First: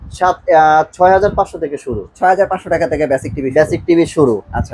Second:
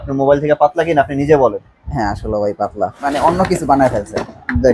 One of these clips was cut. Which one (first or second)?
second